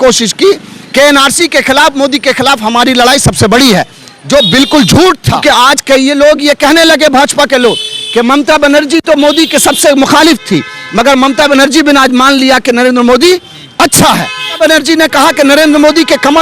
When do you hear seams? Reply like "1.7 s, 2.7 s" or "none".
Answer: 5.4 s, 14.6 s